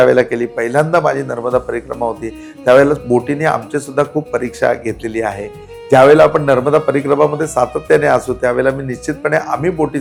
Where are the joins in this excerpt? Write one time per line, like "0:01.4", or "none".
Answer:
none